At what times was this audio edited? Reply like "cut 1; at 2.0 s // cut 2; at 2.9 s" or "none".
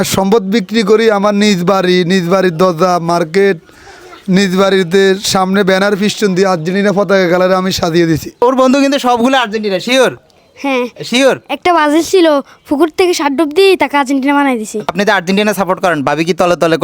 cut 1; at 8.4 s // cut 2; at 14.9 s